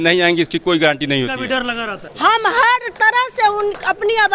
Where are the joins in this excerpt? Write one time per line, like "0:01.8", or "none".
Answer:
0:02.1